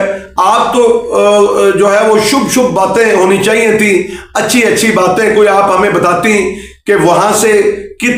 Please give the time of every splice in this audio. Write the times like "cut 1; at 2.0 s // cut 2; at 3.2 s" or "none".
none